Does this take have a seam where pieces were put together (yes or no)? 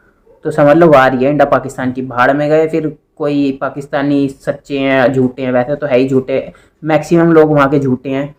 no